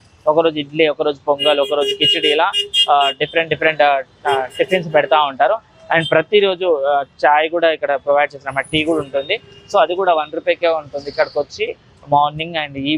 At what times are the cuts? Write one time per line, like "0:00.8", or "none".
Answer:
none